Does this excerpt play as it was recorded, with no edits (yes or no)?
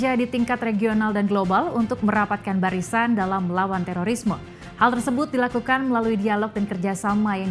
yes